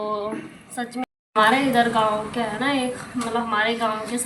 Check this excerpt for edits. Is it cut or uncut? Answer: cut